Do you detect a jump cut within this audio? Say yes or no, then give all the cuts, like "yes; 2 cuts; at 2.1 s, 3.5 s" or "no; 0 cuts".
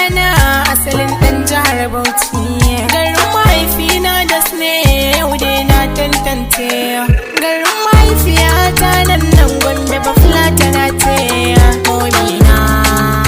no; 0 cuts